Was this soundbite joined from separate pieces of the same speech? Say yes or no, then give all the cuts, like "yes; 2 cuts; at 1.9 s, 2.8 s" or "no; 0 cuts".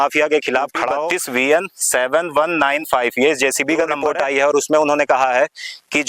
yes; 2 cuts; at 1.0 s, 4.0 s